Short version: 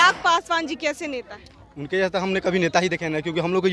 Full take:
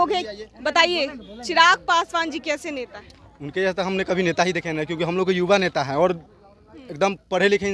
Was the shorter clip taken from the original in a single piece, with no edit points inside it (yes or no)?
yes